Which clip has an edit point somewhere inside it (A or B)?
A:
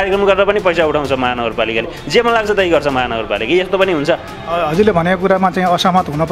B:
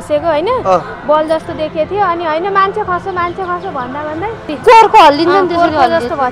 B